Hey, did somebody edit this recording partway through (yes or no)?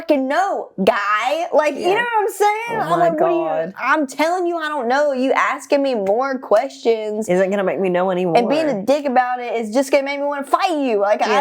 no